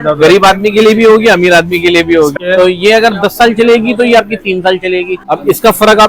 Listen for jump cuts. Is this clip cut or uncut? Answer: cut